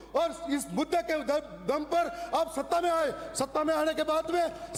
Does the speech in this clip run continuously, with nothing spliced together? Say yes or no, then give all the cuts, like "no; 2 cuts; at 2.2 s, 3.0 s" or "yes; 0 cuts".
yes; 0 cuts